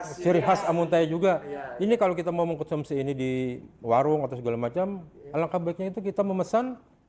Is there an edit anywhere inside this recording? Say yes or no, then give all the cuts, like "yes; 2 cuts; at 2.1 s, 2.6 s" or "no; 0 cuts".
no; 0 cuts